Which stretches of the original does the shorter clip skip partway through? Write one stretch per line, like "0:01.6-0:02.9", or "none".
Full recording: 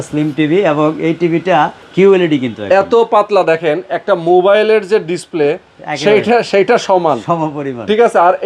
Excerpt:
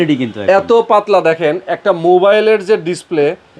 none